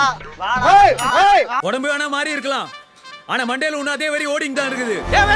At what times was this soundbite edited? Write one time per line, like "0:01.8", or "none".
none